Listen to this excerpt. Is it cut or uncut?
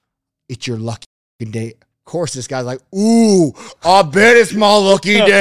uncut